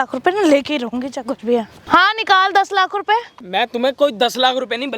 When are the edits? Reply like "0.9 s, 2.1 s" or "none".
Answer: 1.8 s, 3.4 s